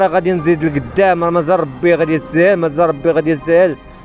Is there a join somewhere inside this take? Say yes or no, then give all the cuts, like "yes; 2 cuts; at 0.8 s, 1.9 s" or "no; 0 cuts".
no; 0 cuts